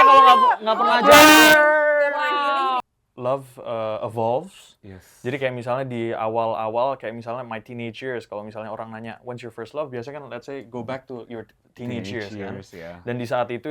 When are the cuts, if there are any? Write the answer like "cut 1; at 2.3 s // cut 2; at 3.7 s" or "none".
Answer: cut 1; at 2.8 s

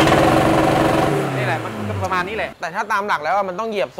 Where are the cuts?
cut 1; at 2.5 s

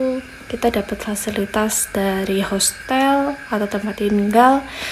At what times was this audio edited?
none

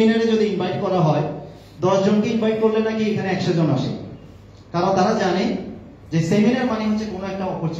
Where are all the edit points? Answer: none

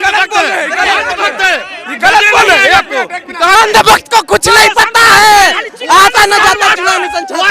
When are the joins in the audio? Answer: cut 1; at 3.5 s

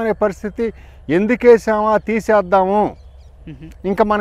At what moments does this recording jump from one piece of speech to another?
none

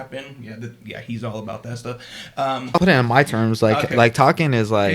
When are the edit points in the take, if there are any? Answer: cut 1; at 2.8 s

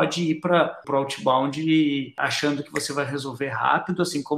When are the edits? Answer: cut 1; at 0.8 s // cut 2; at 2.1 s

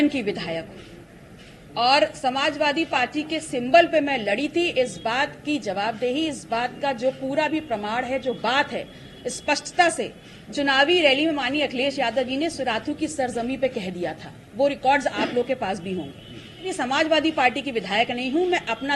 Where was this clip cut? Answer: cut 1; at 16.7 s

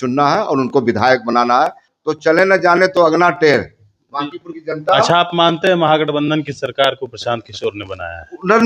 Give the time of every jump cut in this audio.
cut 1; at 1.8 s

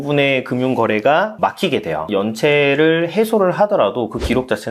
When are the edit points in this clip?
cut 1; at 2.0 s

